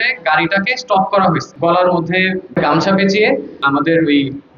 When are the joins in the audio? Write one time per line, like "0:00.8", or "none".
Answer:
0:01.5
0:02.4
0:03.6